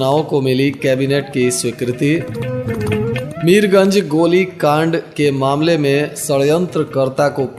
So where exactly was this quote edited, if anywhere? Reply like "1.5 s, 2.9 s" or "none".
none